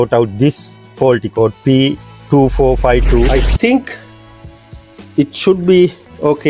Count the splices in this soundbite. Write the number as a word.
one